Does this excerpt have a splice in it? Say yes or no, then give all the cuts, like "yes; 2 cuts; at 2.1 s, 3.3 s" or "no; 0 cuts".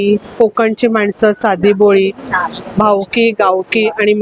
no; 0 cuts